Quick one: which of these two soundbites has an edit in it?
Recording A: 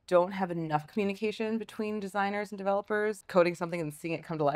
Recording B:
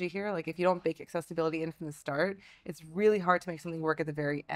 A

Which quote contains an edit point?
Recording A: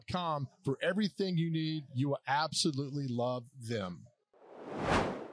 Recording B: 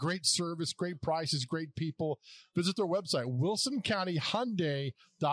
A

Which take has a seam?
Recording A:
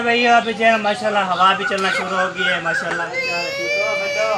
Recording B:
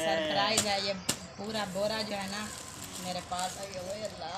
A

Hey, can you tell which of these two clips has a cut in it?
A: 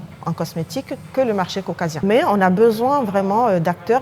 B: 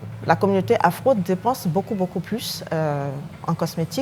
A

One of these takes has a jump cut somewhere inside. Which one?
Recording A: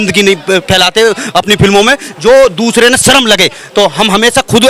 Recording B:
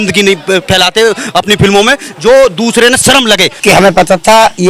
B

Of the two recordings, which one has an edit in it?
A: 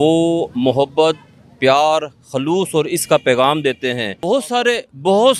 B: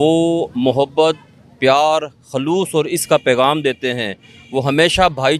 A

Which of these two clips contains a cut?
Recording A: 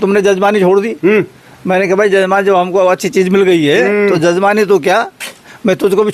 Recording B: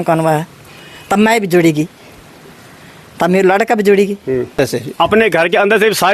B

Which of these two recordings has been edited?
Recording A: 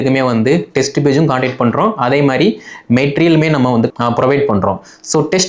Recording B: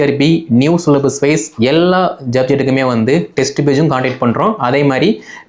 A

